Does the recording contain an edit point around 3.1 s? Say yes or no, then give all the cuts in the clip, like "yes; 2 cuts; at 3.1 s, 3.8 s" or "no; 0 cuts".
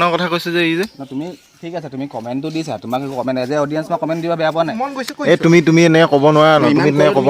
no; 1 cut; at 4.7 s